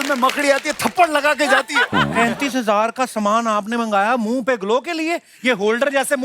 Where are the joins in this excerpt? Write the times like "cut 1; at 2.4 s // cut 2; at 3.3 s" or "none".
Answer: cut 1; at 2.1 s